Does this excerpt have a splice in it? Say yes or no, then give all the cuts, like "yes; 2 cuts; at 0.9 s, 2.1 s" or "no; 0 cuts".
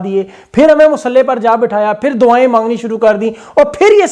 no; 0 cuts